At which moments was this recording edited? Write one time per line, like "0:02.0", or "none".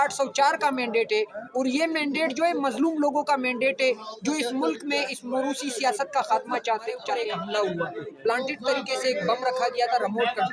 0:07.2